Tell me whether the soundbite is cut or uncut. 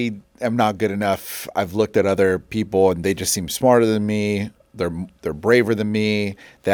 uncut